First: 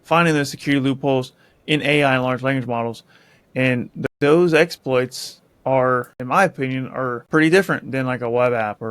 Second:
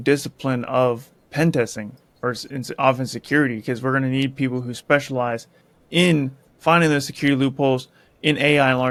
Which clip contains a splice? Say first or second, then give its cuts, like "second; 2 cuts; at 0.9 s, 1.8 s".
first; 3 cuts; at 4.0 s, 6.1 s, 7.2 s